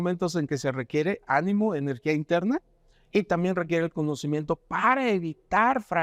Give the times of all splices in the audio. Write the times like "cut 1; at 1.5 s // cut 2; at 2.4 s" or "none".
none

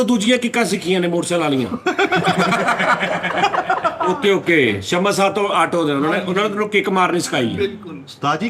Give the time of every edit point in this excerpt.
none

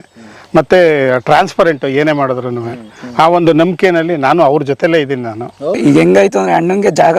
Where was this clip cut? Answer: cut 1; at 5.6 s

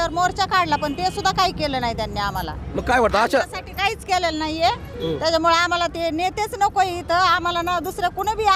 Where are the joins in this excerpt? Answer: none

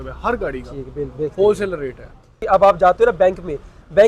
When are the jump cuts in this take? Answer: cut 1; at 2.4 s

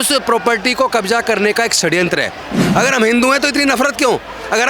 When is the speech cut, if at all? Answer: cut 1; at 2.6 s

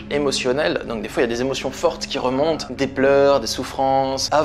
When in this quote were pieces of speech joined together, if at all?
cut 1; at 2.7 s

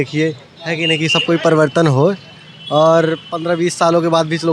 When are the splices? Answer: none

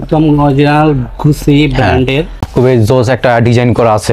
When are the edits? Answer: cut 1; at 2.4 s

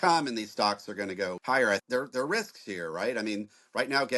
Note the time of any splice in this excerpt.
cut 1; at 1.7 s

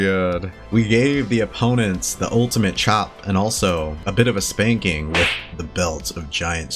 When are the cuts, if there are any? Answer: cut 1; at 4.0 s

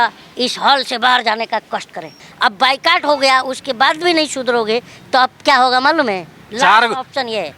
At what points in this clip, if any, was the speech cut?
cut 1; at 2.2 s // cut 2; at 6.4 s

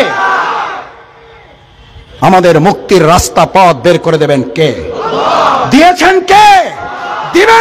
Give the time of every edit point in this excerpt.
cut 1; at 2.0 s

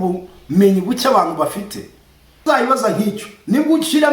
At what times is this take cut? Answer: cut 1; at 2.4 s

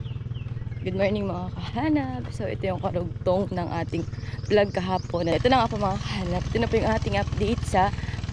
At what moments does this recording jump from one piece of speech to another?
cut 1; at 5.3 s

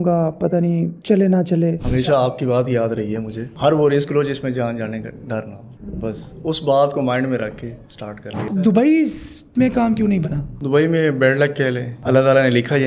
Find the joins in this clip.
cut 1; at 1.8 s // cut 2; at 8.6 s // cut 3; at 12.0 s

